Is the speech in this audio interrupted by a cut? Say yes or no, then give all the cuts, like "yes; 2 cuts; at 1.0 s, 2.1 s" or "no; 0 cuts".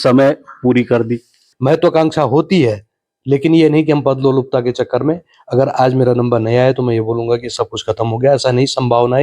yes; 1 cut; at 1.4 s